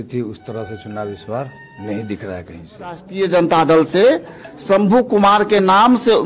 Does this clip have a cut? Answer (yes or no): yes